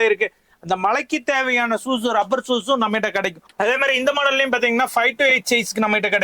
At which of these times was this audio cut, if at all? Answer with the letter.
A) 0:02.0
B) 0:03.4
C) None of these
B